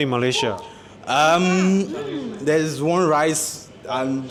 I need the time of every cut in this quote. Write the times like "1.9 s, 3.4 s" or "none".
none